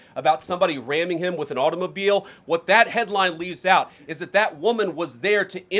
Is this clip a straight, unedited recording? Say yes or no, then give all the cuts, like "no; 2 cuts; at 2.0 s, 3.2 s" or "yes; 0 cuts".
yes; 0 cuts